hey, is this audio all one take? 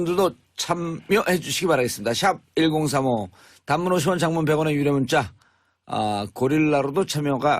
no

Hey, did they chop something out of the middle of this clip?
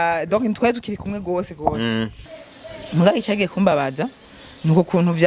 yes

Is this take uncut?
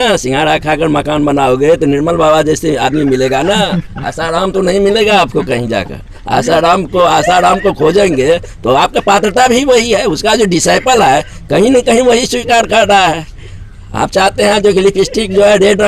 yes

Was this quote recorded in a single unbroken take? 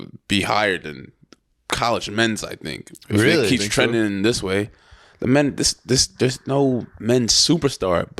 yes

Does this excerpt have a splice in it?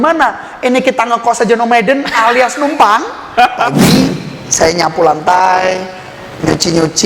yes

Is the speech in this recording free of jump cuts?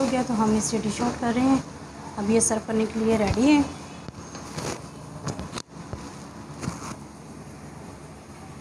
yes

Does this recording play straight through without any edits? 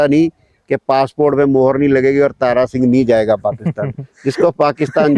yes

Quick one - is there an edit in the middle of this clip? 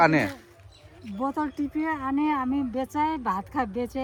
no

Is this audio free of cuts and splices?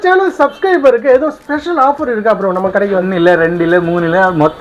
no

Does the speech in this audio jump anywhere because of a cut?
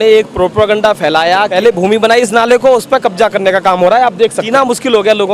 yes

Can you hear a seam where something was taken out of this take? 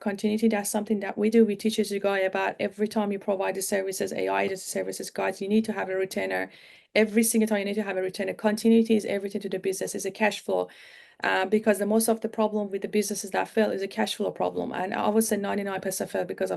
no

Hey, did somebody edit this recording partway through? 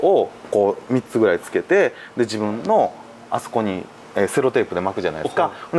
no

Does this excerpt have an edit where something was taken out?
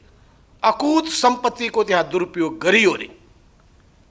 no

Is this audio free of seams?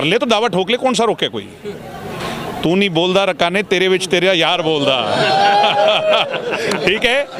yes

